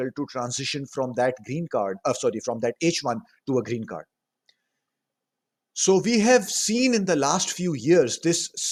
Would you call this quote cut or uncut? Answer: uncut